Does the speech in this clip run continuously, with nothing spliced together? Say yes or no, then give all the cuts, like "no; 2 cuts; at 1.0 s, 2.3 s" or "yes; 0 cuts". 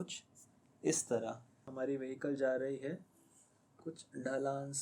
no; 1 cut; at 1.6 s